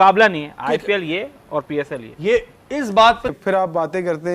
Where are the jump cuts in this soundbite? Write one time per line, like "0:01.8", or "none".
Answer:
0:03.3